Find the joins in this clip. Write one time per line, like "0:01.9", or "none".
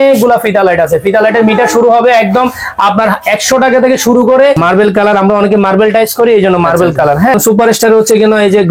0:04.6
0:07.3